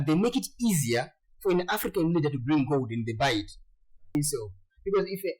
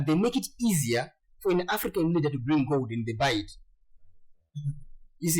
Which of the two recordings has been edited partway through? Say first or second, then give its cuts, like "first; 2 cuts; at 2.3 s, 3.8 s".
first; 1 cut; at 4.1 s